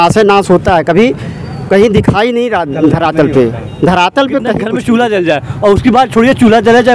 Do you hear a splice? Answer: yes; 1 cut; at 4.6 s

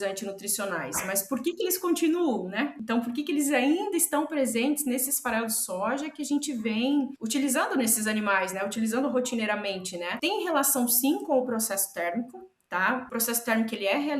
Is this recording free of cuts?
no; 4 cuts; at 2.8 s, 7.2 s, 10.1 s, 13.1 s

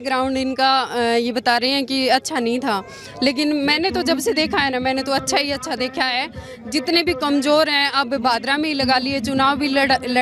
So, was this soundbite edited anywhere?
no; 0 cuts

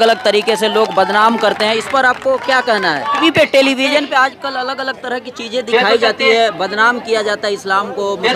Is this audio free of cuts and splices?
no; 1 cut; at 3.2 s

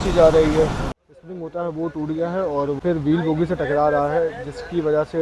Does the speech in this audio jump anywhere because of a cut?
yes; 2 cuts; at 1.0 s, 2.8 s

